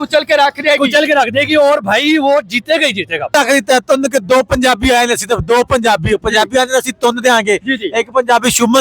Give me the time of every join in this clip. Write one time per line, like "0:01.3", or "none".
0:03.3